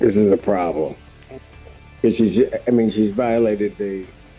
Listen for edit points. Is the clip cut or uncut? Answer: uncut